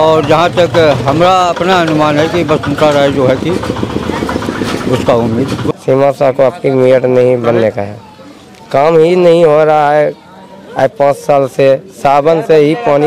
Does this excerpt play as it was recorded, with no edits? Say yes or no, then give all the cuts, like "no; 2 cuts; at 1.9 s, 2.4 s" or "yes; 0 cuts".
no; 1 cut; at 5.7 s